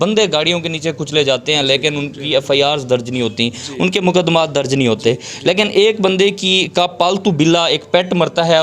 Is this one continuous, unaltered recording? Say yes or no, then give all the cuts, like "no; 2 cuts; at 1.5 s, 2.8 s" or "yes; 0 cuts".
yes; 0 cuts